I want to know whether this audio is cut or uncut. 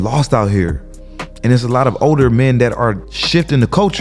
cut